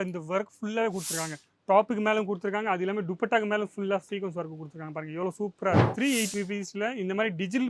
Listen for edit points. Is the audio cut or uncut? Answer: cut